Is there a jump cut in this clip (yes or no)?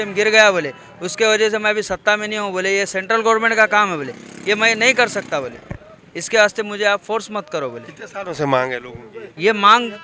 no